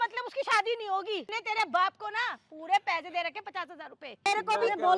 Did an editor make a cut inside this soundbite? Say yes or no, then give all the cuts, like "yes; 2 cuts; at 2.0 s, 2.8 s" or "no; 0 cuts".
yes; 2 cuts; at 1.3 s, 4.3 s